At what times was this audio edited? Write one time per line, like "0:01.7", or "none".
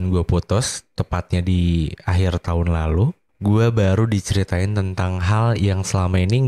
0:03.3

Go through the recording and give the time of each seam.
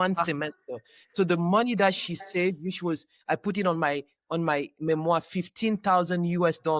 none

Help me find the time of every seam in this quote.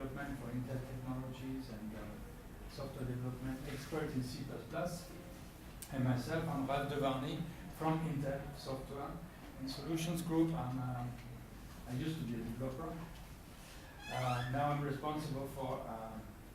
0:01.2

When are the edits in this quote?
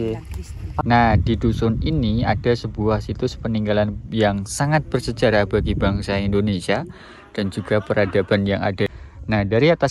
0:00.8
0:08.9

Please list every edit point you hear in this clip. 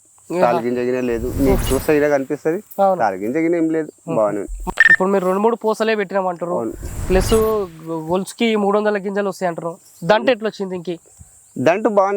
0:04.6

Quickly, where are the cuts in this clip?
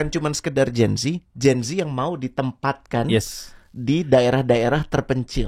none

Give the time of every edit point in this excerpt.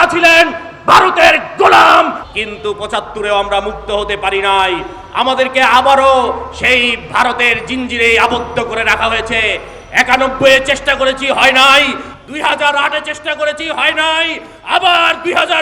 0:02.2

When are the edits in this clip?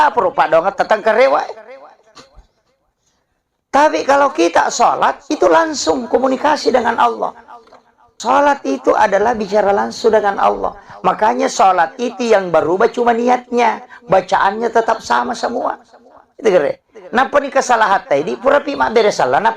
0:08.2

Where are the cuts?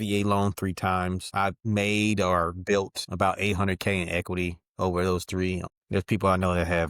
0:05.7

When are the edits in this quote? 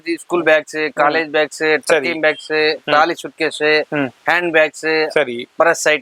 none

